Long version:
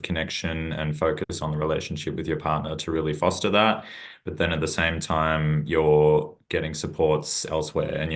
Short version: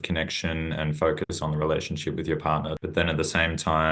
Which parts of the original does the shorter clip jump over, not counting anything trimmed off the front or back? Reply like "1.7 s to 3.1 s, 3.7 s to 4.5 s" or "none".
2.7 s to 4.2 s